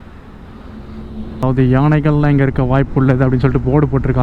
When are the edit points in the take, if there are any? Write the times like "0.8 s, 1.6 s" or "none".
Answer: 1.4 s